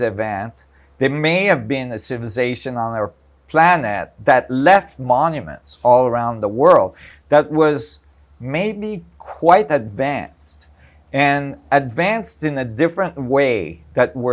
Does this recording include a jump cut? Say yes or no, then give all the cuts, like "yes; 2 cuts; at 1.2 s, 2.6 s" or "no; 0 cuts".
no; 0 cuts